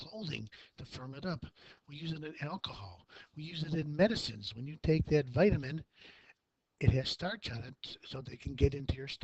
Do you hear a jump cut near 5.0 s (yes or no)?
yes